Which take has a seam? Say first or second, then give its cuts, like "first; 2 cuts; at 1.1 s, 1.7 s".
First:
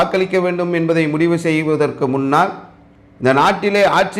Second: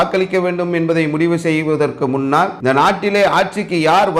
second; 1 cut; at 2.6 s